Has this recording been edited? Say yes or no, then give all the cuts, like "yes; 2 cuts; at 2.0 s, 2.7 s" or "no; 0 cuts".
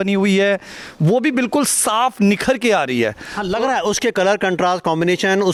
no; 0 cuts